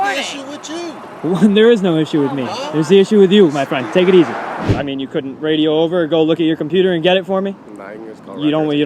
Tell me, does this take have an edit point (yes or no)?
yes